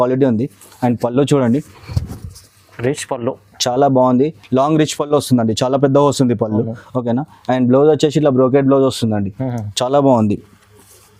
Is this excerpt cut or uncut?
uncut